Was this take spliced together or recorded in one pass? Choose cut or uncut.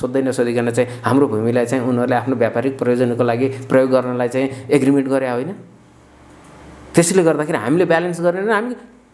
uncut